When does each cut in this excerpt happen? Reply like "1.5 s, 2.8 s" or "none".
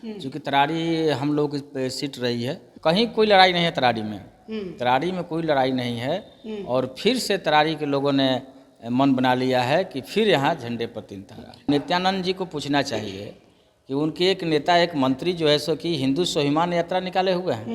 2.7 s, 11.7 s

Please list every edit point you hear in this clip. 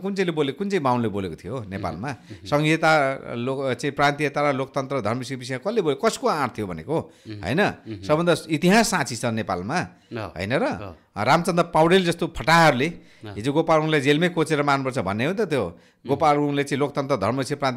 none

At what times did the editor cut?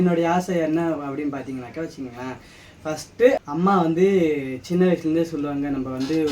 3.4 s

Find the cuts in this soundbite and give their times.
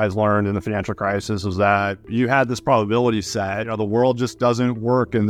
2.1 s, 3.7 s

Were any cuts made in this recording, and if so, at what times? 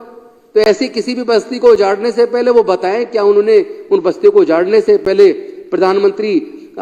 none

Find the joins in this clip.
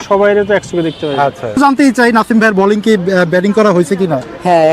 1.6 s

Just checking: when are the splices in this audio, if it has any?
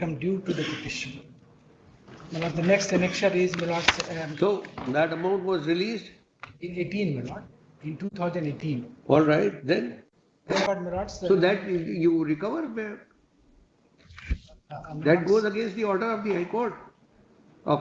10.7 s

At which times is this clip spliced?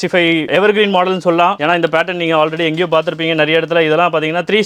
none

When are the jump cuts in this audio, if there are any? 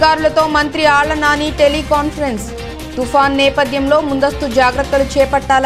none

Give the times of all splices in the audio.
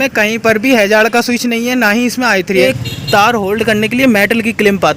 2.6 s

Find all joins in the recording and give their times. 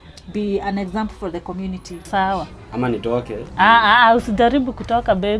2.0 s

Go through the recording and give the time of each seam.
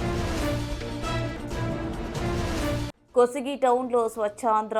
none

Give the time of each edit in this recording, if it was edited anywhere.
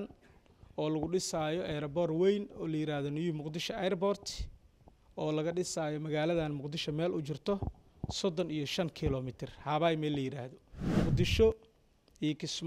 10.9 s

